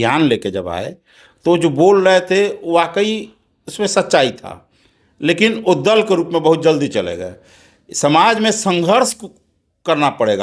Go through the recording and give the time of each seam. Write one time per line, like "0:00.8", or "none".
none